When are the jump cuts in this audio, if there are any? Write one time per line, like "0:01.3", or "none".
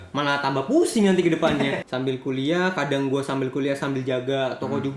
0:01.9

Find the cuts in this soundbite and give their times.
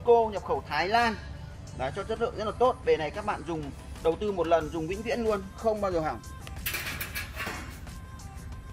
none

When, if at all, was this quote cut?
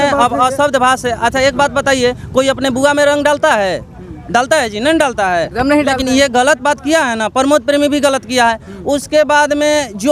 none

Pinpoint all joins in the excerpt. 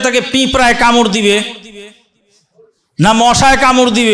none

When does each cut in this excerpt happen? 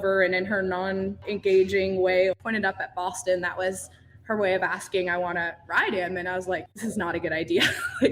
0:01.2
0:02.4
0:06.7

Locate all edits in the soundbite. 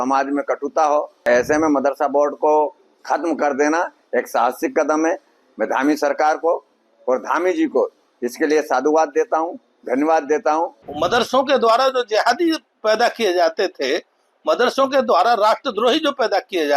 0:01.2
0:10.8

